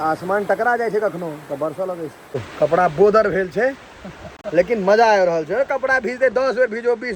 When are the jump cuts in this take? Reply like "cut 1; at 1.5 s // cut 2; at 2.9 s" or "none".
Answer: cut 1; at 2.2 s